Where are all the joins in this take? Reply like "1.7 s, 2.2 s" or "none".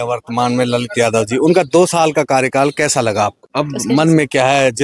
3.4 s